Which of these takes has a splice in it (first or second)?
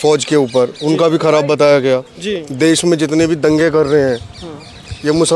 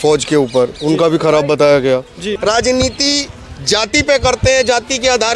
second